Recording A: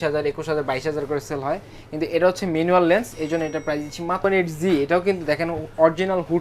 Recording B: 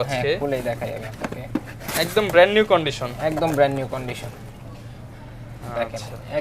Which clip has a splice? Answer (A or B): A